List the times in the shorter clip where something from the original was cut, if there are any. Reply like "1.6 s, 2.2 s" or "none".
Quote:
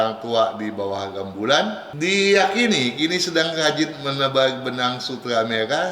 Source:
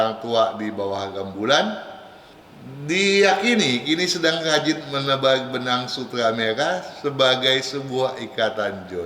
1.9 s